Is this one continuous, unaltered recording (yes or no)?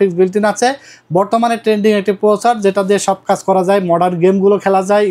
yes